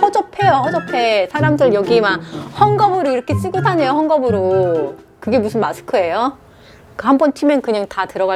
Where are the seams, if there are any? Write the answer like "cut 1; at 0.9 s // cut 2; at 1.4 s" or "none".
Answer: none

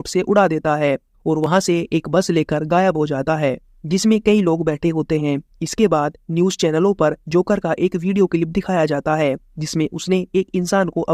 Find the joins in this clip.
none

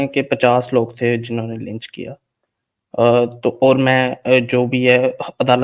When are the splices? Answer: none

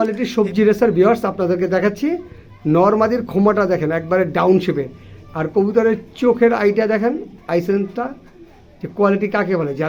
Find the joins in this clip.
none

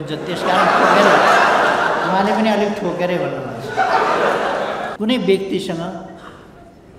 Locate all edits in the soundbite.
cut 1; at 4.9 s

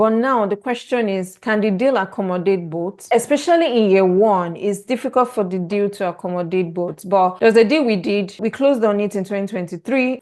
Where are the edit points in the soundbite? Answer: cut 1; at 3.0 s

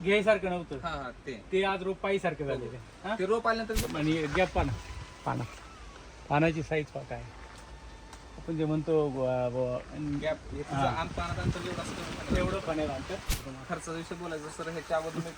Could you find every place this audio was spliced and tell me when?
cut 1; at 3.8 s // cut 2; at 13.3 s

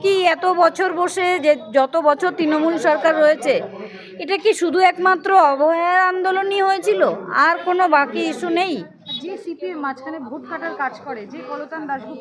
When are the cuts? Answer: cut 1; at 9.2 s

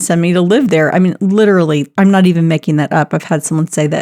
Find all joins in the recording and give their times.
cut 1; at 1.9 s

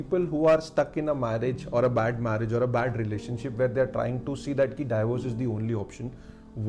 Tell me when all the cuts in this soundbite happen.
none

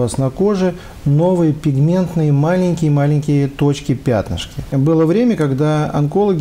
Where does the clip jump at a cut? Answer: cut 1; at 4.6 s

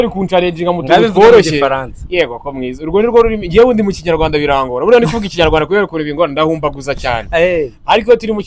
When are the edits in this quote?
none

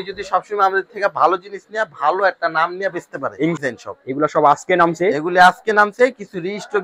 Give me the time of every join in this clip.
cut 1; at 3.6 s

